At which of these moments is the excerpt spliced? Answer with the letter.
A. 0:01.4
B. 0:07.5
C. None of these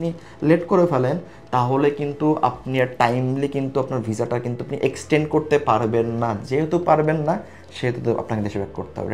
C